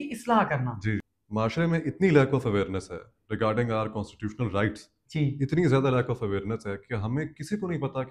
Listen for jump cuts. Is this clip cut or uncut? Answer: cut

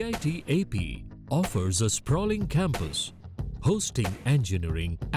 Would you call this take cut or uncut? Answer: uncut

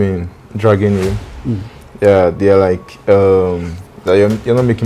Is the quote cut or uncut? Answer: uncut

